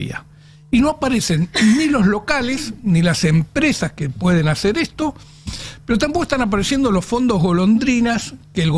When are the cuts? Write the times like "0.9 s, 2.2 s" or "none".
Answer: none